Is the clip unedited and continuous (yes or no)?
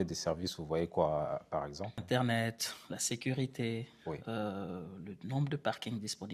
no